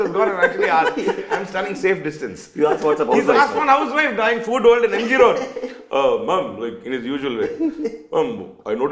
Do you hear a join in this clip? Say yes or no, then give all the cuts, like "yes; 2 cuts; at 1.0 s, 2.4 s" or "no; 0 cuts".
no; 0 cuts